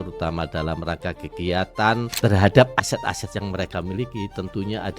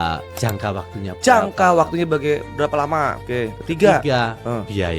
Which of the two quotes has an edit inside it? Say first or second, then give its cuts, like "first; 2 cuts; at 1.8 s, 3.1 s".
first; 1 cut; at 2.1 s